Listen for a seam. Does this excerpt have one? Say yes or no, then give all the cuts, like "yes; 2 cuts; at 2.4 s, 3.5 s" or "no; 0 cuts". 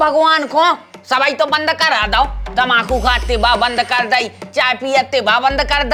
no; 0 cuts